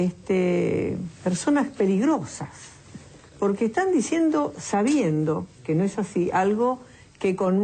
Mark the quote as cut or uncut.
uncut